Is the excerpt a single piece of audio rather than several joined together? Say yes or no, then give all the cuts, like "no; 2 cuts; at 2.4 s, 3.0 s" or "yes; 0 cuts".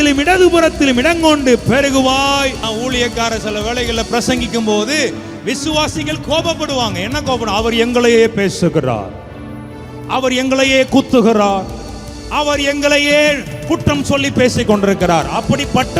no; 1 cut; at 2.6 s